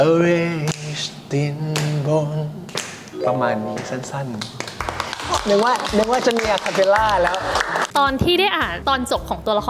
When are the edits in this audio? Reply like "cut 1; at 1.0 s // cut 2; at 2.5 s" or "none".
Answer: cut 1; at 7.8 s // cut 2; at 8.7 s